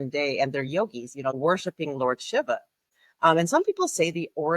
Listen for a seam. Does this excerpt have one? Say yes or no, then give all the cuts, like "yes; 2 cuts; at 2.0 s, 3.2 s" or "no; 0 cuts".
yes; 2 cuts; at 1.3 s, 2.9 s